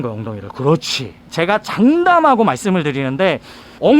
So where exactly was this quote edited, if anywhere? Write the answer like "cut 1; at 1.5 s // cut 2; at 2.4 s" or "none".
cut 1; at 1.3 s